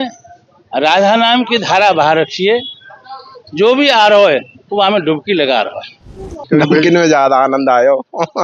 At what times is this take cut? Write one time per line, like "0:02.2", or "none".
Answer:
0:06.4